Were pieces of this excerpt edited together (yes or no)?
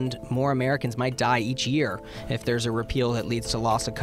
no